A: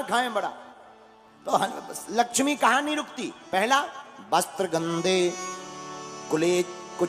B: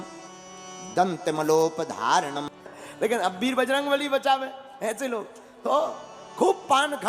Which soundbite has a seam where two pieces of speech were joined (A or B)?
B